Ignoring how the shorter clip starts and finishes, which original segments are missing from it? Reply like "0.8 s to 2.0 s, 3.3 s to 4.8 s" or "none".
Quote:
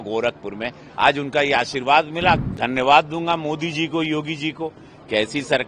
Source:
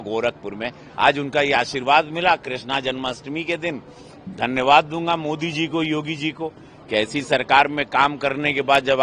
2.5 s to 4.3 s